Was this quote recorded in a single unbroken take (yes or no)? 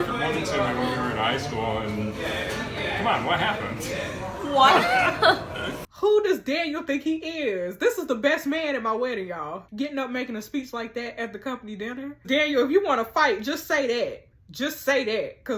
no